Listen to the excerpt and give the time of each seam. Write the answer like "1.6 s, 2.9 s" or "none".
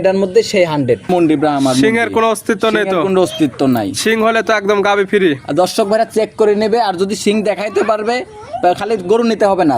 1.1 s